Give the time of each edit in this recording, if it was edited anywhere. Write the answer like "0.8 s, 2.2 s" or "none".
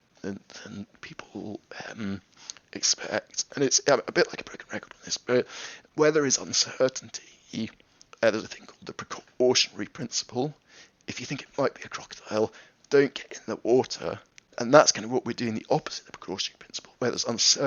10.9 s, 14.6 s